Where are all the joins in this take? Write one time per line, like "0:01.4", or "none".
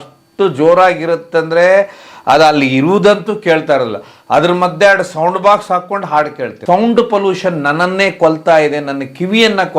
0:06.6